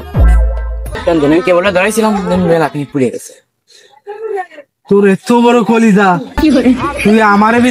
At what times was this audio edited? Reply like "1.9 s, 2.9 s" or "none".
1.0 s